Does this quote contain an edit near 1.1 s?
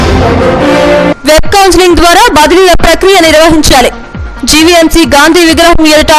no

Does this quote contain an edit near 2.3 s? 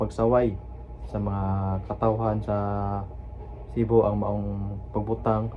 no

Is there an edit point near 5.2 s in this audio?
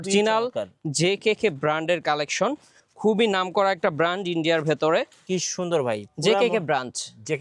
yes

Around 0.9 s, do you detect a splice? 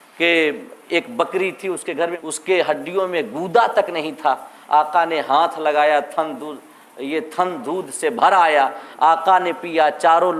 no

